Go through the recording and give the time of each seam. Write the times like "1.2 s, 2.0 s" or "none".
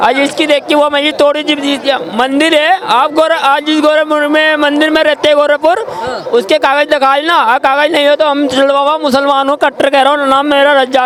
none